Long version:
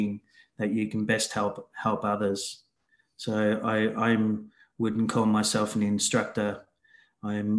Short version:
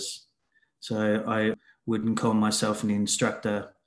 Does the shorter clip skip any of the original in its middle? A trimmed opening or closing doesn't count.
yes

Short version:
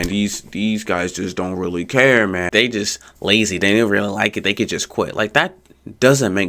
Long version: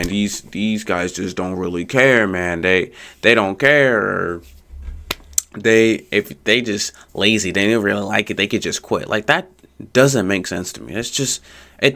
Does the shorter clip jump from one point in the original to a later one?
yes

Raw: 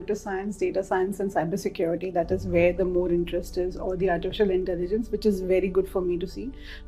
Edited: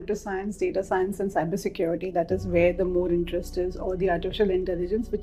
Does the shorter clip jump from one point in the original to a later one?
no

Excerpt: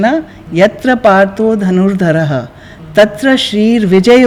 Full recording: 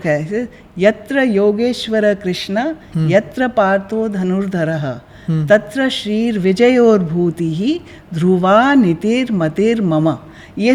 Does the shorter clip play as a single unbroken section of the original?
yes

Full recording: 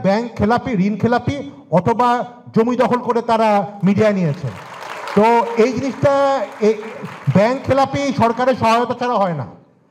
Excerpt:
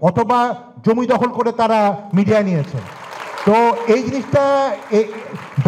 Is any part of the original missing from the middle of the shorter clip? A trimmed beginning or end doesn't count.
no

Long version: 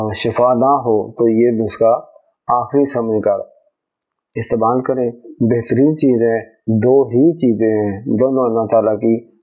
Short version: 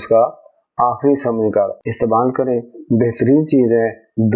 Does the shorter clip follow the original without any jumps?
no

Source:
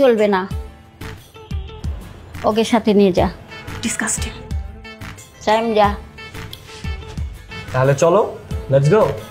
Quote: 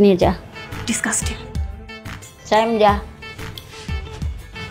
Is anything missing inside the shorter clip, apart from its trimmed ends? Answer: no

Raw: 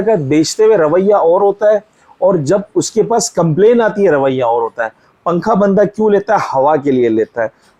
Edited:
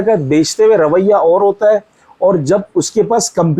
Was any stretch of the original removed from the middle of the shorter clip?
no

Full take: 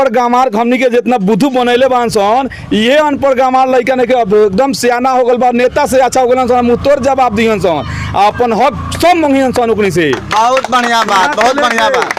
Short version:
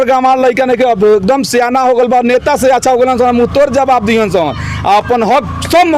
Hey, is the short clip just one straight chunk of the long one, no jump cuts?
yes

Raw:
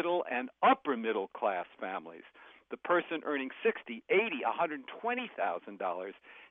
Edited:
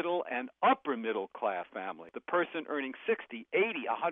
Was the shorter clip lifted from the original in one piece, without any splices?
no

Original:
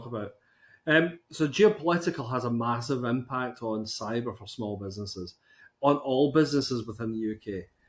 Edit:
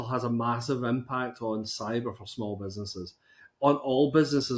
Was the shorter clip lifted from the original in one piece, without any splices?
yes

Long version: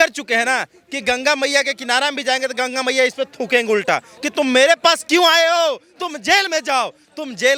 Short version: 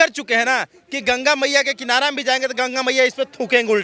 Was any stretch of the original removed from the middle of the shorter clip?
no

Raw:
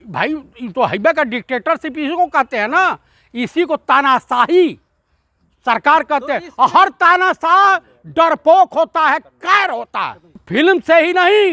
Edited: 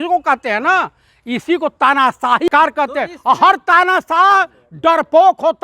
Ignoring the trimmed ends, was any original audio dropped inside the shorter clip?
yes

